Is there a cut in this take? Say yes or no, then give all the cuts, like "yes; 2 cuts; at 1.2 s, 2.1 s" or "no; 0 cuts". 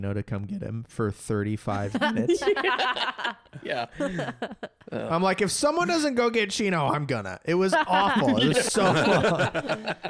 no; 0 cuts